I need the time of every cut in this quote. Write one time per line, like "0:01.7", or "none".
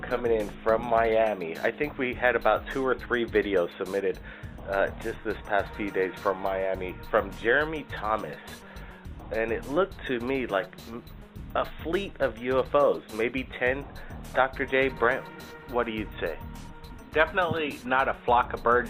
0:12.5